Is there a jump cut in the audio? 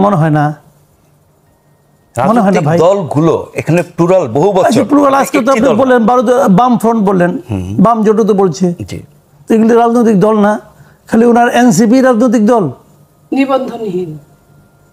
no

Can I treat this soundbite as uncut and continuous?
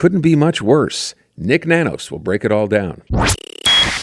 yes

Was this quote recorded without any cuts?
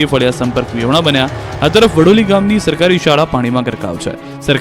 yes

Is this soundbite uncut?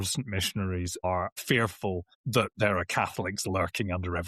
no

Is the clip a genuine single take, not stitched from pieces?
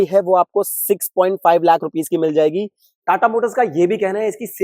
no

